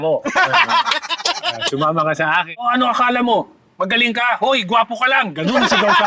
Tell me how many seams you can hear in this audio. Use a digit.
1